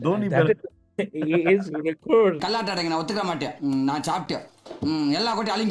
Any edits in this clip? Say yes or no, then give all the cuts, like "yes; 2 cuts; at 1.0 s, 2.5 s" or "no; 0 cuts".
no; 0 cuts